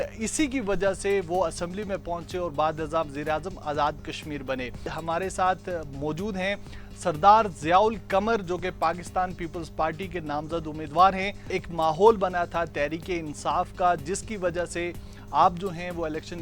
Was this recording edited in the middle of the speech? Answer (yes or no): yes